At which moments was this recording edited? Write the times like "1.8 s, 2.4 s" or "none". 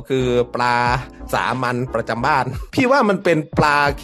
2.6 s